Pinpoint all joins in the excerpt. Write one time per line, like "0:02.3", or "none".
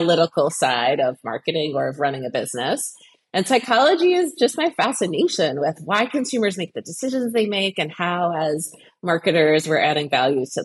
none